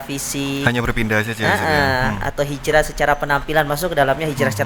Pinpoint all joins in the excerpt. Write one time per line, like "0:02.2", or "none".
none